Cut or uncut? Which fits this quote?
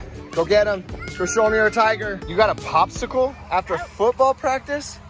cut